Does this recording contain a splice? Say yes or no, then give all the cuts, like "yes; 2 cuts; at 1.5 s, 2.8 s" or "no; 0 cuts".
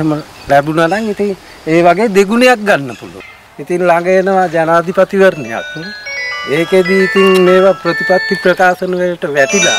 yes; 1 cut; at 3.1 s